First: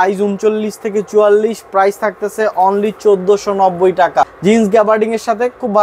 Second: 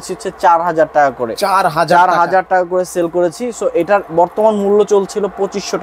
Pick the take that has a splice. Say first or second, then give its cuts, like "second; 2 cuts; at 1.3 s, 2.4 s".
first; 1 cut; at 4.3 s